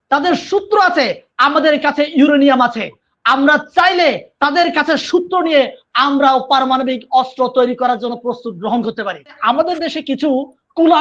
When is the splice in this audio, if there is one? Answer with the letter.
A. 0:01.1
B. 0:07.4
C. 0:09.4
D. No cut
C